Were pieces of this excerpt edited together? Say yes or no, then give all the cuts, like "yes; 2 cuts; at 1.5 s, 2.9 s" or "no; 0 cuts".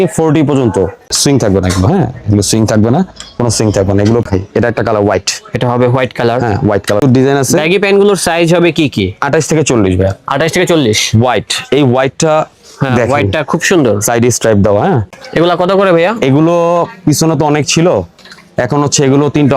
yes; 4 cuts; at 1.1 s, 4.3 s, 7.0 s, 15.1 s